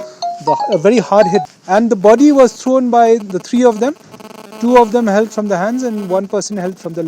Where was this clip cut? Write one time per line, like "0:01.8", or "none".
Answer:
0:01.5